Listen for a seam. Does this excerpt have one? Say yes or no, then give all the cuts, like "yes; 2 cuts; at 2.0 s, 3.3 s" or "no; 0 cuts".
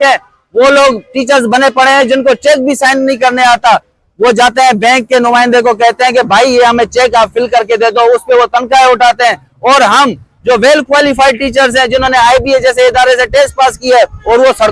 no; 0 cuts